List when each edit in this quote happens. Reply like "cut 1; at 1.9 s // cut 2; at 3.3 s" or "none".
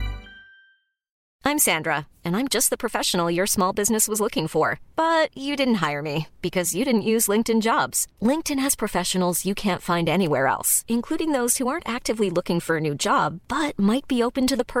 cut 1; at 1.2 s